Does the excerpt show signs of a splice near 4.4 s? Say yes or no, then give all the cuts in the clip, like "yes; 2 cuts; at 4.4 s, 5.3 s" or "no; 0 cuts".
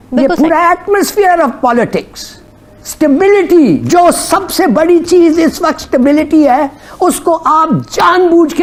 no; 0 cuts